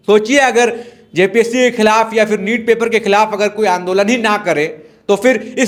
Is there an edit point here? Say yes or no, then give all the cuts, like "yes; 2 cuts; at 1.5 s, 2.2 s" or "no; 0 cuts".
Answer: no; 0 cuts